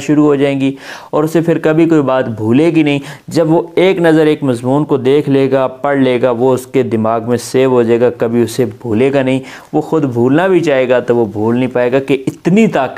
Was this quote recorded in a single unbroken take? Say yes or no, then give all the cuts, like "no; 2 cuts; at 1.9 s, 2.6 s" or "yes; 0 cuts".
yes; 0 cuts